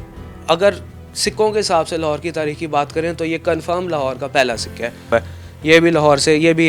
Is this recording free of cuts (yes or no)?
no